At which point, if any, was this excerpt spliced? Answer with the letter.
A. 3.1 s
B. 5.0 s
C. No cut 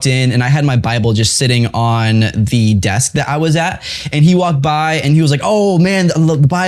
C